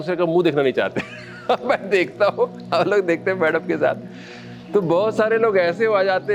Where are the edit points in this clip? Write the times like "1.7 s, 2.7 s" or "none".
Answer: none